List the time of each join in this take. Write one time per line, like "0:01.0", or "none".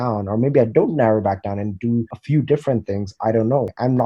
0:02.2